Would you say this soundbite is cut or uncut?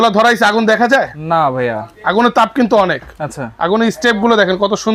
uncut